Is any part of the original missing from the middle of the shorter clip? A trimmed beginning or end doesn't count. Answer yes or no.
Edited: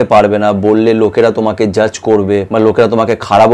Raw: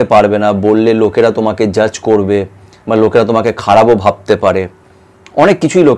yes